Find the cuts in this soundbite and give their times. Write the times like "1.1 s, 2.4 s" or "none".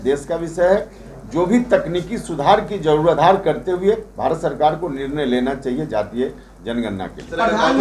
none